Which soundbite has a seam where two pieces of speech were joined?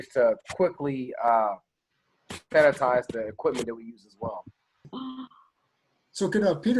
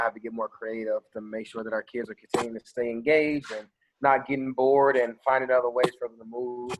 first; 1 cut; at 4.9 s

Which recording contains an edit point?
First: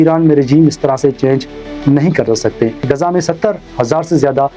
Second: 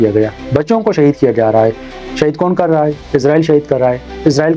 first; 1 cut; at 2.8 s

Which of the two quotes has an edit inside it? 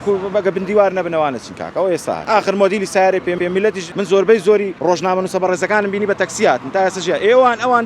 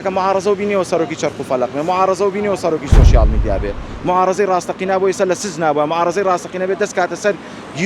first; 3 cuts; at 2.2 s, 3.4 s, 4.7 s

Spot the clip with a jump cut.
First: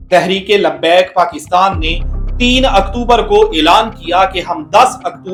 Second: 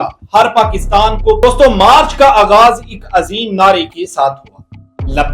second; 1 cut; at 1.4 s

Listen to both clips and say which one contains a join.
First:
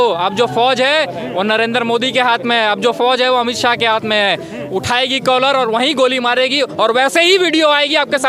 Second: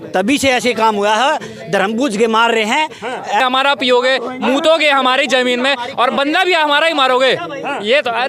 second; 1 cut; at 3.4 s

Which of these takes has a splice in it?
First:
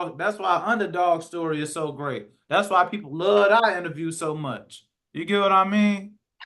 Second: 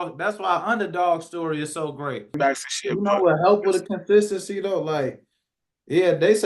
second; 1 cut; at 2.4 s

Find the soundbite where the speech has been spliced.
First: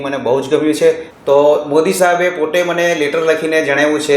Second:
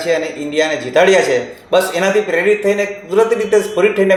first; 1 cut; at 1.1 s

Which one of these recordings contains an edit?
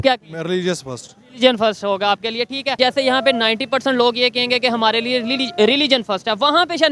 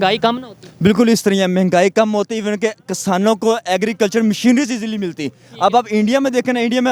first; 1 cut; at 2.8 s

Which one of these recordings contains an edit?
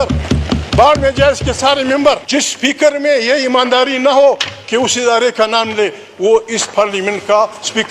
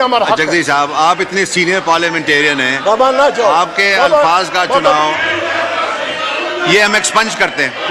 first; 1 cut; at 2.2 s

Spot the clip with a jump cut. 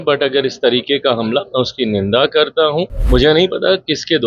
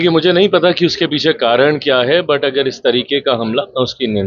first; 1 cut; at 3.0 s

